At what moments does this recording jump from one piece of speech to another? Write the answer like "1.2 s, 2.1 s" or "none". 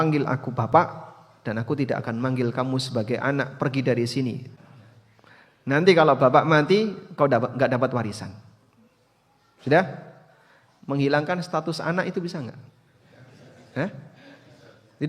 4.5 s

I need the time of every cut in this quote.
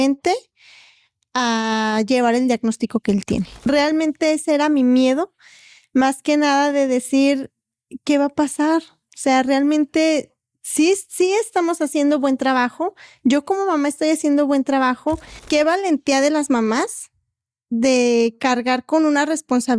3.7 s, 15.3 s

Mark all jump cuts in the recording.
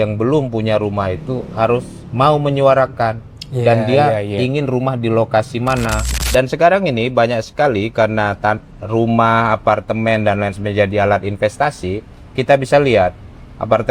6.0 s

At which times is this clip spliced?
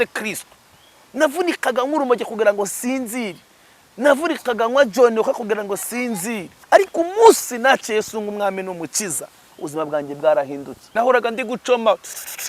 6.5 s, 10.8 s

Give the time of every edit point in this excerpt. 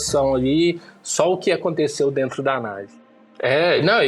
3.0 s

